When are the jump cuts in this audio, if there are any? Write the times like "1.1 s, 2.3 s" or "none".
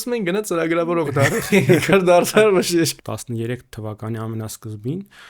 3.0 s